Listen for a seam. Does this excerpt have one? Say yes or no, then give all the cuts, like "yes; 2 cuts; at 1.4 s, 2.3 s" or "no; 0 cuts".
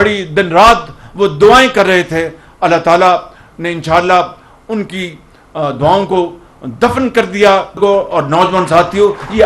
yes; 1 cut; at 7.8 s